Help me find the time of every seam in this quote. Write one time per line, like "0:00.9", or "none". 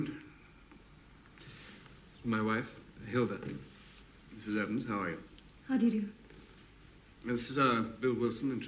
none